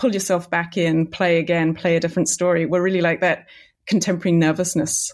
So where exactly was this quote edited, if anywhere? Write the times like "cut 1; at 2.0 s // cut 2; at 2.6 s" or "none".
cut 1; at 3.7 s